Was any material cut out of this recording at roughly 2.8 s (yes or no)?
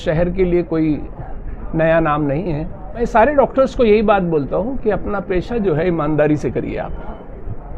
yes